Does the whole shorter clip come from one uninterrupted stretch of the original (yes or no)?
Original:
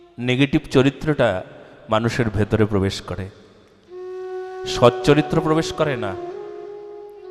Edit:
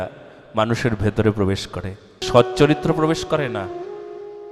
no